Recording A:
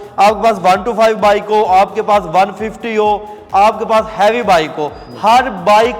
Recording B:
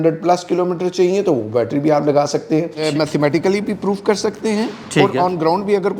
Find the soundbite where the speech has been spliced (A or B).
B